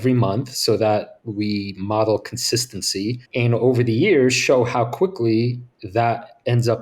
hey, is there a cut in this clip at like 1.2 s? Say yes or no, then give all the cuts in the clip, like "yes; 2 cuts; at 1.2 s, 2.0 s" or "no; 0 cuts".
yes; 2 cuts; at 1.2 s, 3.2 s